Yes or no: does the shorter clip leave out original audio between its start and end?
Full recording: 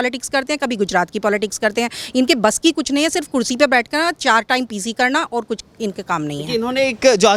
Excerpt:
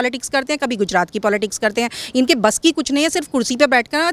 no